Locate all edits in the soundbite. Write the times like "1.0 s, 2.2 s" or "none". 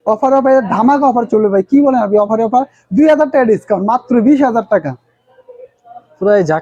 none